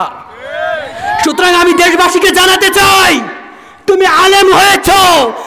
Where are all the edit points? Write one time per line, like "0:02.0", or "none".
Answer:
none